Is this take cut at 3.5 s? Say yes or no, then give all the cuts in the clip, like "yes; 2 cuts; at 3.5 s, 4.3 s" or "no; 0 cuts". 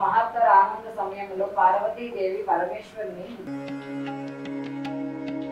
yes; 1 cut; at 3.5 s